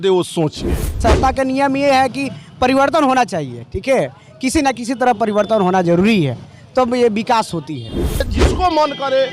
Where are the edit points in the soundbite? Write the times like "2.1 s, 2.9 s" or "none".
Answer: 1.0 s, 8.1 s